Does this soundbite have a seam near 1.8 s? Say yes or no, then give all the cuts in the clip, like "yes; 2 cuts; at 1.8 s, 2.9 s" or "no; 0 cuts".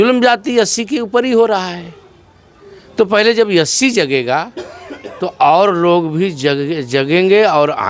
no; 0 cuts